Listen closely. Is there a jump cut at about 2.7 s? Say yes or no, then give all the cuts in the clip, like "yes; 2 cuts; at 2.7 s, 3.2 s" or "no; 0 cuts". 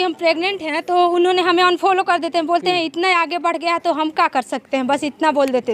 no; 0 cuts